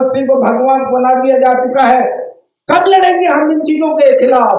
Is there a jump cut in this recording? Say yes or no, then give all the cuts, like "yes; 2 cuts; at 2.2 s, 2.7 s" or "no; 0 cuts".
no; 0 cuts